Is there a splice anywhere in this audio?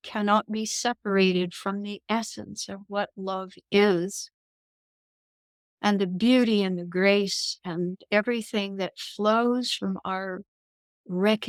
no; 0 cuts

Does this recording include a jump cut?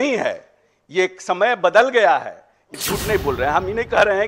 yes; 1 cut; at 2.7 s

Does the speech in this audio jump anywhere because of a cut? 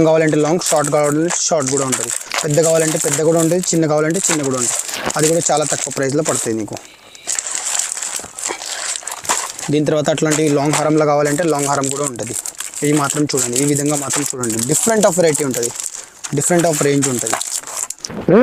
no; 0 cuts

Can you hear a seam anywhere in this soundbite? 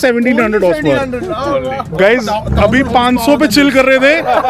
no; 0 cuts

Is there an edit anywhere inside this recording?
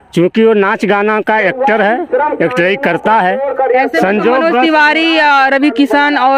no; 0 cuts

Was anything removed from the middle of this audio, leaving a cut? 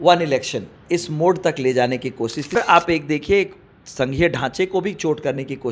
yes; 1 cut; at 2.6 s

